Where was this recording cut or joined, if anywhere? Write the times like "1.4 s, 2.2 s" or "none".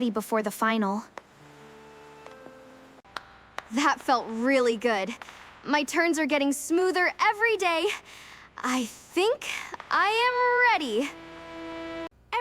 3.0 s